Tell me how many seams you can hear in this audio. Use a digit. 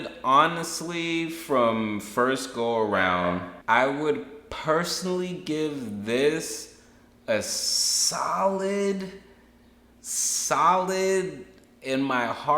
1